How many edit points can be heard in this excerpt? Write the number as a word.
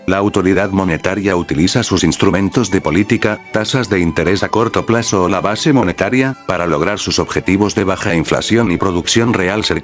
one